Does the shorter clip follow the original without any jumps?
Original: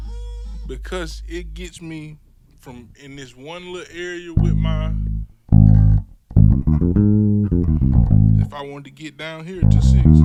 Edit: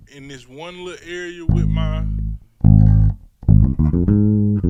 yes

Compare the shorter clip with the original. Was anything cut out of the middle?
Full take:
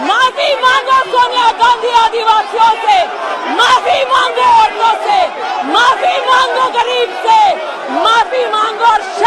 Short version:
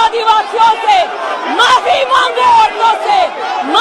no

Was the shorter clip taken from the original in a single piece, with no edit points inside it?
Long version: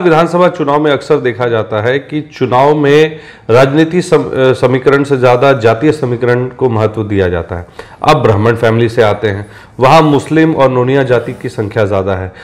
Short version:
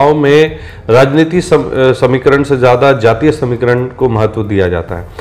yes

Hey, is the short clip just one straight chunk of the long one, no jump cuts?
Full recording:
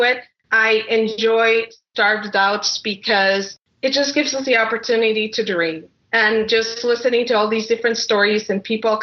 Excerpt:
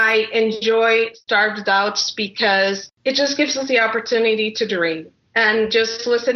no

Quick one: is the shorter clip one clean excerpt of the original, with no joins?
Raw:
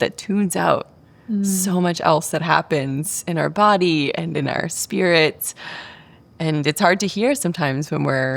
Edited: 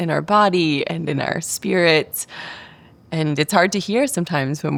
yes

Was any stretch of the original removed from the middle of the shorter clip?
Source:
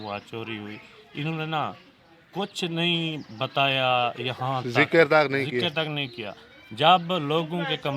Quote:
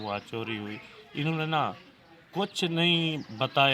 no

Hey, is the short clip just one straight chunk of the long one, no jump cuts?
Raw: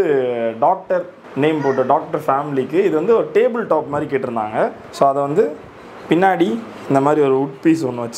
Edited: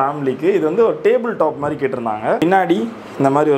no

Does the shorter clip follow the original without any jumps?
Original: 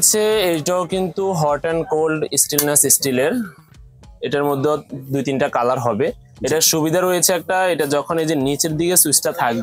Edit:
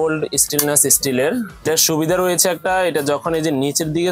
no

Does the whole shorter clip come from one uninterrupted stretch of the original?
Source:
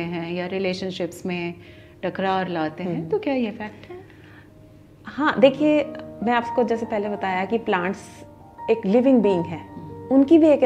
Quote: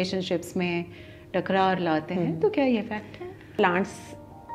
no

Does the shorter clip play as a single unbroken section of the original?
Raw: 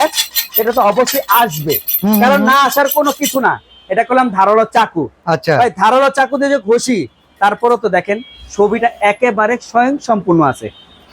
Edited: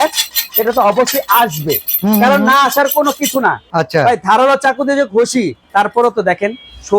no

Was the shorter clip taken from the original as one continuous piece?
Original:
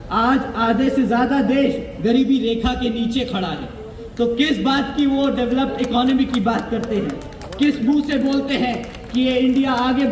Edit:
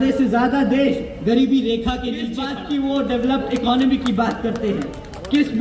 no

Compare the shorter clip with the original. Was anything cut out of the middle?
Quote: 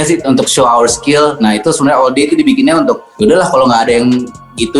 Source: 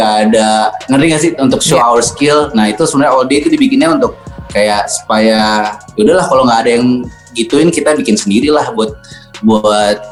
yes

